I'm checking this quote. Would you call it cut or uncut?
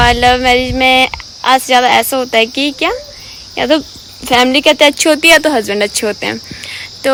uncut